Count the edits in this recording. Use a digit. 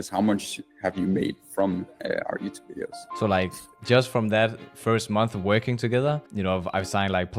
3